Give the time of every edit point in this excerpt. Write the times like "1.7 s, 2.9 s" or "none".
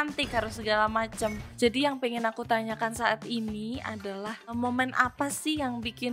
1.4 s, 4.6 s